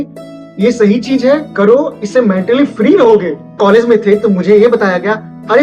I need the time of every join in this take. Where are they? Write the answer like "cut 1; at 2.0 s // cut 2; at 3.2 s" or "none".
cut 1; at 3.4 s